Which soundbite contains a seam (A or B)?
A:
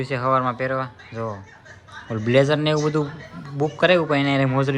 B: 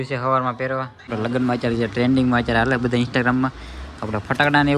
B